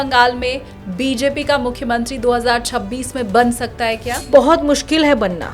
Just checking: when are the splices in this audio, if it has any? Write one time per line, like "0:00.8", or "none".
0:04.2